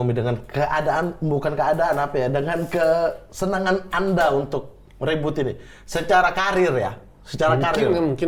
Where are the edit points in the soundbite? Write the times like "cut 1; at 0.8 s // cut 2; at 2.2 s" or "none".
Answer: none